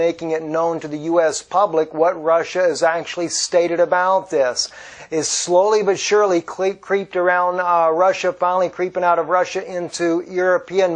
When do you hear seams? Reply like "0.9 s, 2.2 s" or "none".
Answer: 3.4 s